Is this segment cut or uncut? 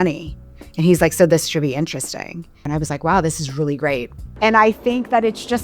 cut